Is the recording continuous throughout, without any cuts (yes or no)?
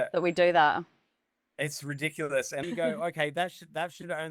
no